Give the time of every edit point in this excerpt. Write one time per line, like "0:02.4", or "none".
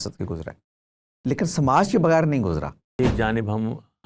0:03.0